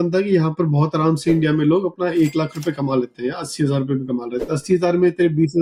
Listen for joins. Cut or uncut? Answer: uncut